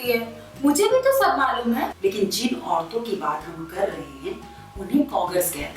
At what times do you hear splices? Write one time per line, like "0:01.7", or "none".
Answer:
0:01.9